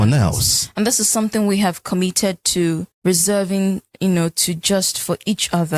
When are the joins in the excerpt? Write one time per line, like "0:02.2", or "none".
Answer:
none